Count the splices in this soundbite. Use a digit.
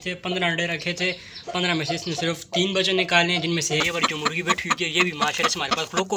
1